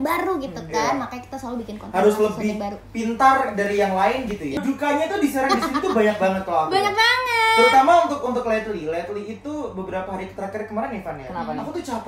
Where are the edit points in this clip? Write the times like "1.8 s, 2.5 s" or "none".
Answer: 4.5 s